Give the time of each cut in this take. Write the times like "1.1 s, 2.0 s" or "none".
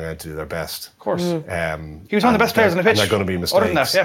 none